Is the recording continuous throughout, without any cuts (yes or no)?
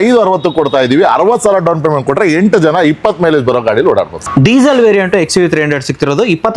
no